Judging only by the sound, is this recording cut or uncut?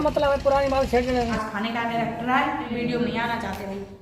cut